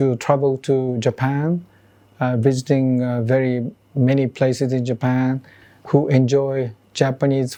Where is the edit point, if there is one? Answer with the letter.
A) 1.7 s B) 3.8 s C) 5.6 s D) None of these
D